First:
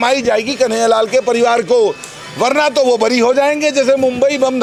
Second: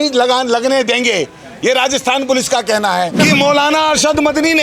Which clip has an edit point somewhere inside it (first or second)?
second